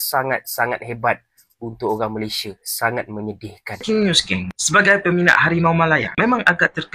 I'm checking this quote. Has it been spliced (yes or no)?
yes